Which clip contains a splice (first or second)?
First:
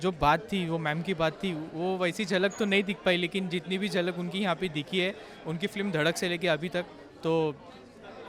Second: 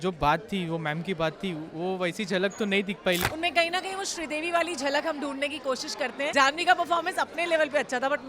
second